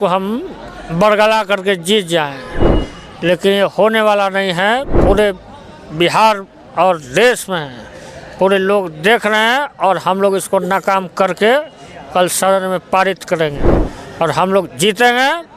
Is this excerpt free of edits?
yes; 0 cuts

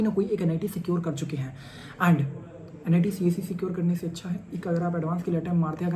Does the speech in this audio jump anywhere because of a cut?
no; 0 cuts

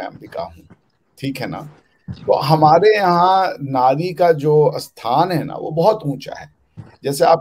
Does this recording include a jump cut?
no; 0 cuts

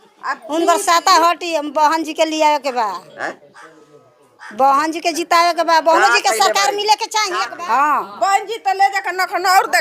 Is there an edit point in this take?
yes; 1 cut; at 7.4 s

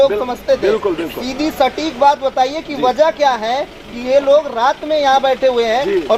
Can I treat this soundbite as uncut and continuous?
yes; 0 cuts

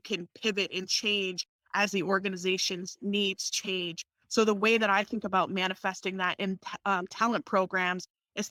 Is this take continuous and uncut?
yes; 0 cuts

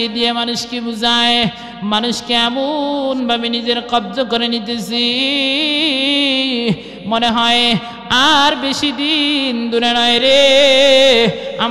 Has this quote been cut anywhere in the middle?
no; 0 cuts

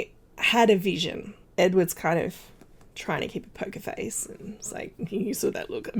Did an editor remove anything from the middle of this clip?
no; 0 cuts

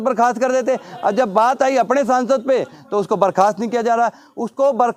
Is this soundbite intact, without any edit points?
yes; 0 cuts

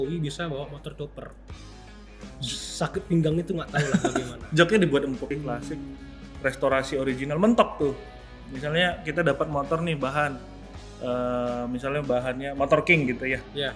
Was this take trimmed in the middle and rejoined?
yes; 1 cut; at 5.4 s

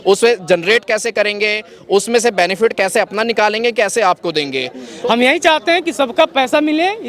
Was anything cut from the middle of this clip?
yes; 1 cut; at 4.8 s

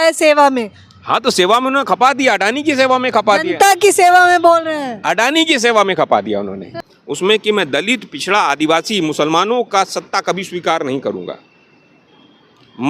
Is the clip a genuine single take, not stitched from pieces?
no; 1 cut; at 6.7 s

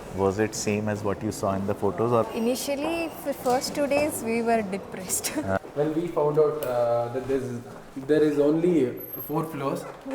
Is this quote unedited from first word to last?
no; 2 cuts; at 2.3 s, 5.6 s

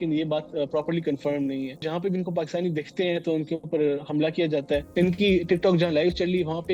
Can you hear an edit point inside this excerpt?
yes; 2 cuts; at 1.8 s, 4.9 s

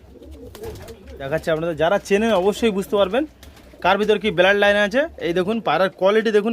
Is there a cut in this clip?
yes; 1 cut; at 1.2 s

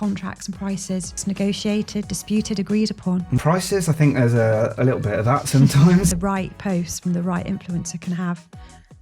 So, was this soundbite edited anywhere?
yes; 3 cuts; at 1.2 s, 3.4 s, 6.1 s

